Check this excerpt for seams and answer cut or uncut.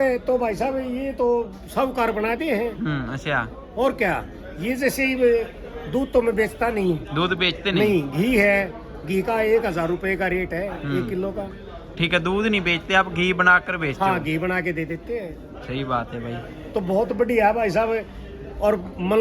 uncut